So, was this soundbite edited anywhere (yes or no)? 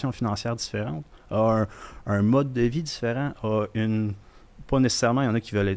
no